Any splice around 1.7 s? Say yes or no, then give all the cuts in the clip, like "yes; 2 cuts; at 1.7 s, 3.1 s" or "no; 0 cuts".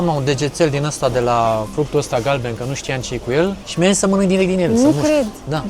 yes; 2 cuts; at 1.7 s, 3.6 s